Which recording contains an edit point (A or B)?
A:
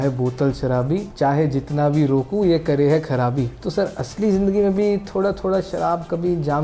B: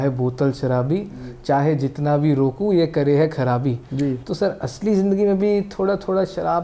A